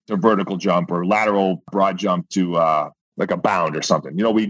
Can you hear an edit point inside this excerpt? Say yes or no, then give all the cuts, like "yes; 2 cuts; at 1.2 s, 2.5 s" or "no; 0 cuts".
yes; 2 cuts; at 1.7 s, 3.1 s